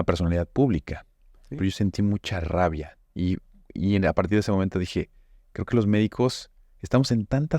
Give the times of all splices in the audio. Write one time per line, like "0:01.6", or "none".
0:01.4